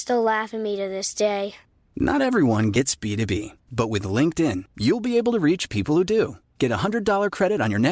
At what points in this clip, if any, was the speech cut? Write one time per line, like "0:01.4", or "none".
none